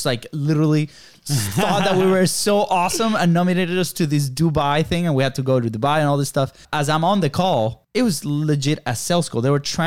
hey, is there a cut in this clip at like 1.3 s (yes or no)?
no